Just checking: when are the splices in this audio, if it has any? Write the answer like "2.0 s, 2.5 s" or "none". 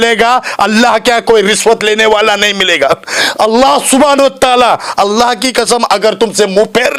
none